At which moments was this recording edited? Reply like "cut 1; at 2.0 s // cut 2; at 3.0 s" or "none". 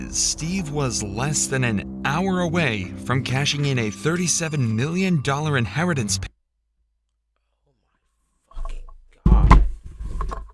none